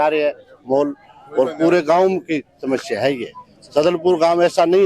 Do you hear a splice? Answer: no; 0 cuts

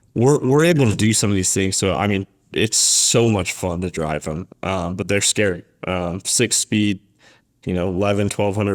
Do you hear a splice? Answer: yes; 1 cut; at 2.5 s

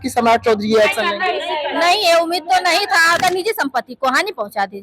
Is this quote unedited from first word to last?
no; 1 cut; at 3.2 s

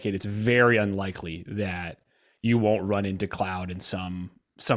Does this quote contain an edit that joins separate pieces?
no; 0 cuts

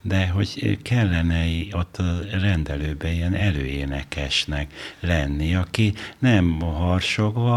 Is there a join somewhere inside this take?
no; 0 cuts

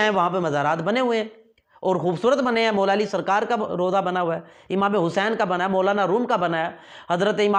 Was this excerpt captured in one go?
yes; 0 cuts

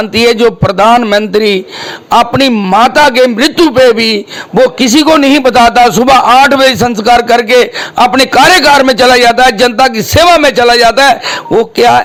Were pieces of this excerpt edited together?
no; 0 cuts

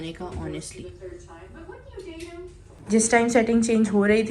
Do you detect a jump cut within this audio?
yes; 1 cut; at 2.8 s

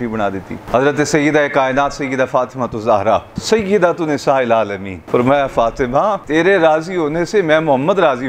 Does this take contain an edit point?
yes; 3 cuts; at 3.3 s, 4.9 s, 6.2 s

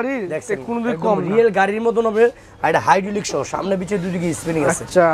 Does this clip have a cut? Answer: no; 0 cuts

